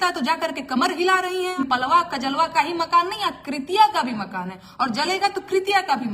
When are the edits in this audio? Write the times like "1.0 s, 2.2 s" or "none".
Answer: 1.6 s